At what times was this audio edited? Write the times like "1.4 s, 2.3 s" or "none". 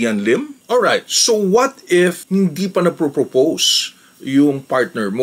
none